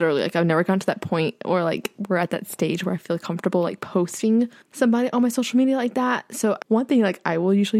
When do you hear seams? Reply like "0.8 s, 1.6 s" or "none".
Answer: 4.6 s, 6.6 s